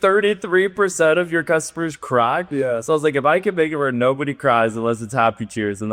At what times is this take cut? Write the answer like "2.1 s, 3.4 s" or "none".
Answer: none